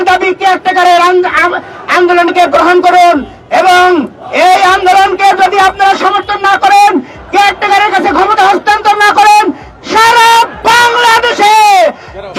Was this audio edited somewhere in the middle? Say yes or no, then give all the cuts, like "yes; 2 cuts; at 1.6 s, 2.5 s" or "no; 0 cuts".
no; 0 cuts